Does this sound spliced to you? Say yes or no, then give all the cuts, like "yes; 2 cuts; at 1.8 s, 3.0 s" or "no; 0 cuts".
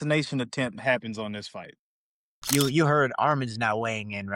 yes; 1 cut; at 2.3 s